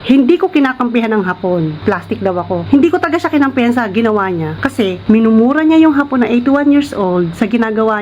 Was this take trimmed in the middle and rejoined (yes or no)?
yes